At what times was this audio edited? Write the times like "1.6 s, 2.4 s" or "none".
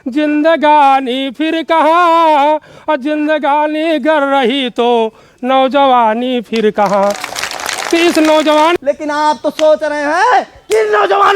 8.8 s